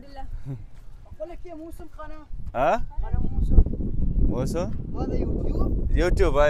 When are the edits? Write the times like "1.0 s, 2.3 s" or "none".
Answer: none